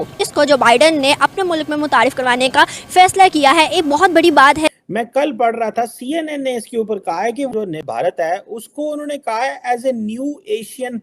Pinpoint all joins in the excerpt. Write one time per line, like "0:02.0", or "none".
0:04.7
0:07.5